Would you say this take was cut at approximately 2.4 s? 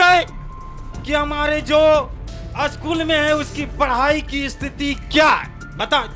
no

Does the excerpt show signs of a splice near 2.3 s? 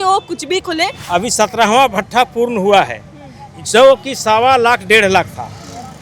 no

